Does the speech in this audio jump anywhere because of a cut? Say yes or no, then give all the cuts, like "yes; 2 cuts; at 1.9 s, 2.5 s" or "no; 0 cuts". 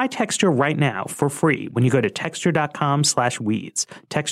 no; 0 cuts